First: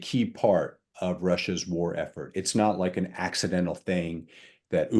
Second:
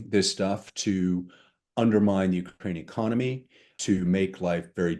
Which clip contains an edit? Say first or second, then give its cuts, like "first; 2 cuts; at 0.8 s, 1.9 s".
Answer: second; 1 cut; at 3.7 s